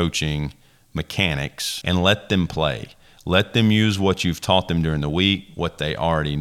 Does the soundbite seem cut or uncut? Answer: cut